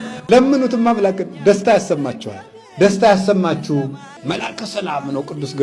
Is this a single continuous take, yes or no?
no